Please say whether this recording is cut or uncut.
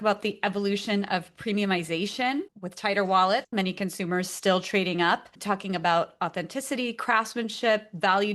cut